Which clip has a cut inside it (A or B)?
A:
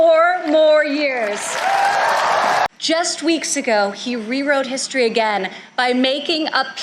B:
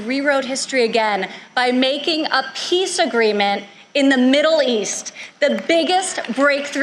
A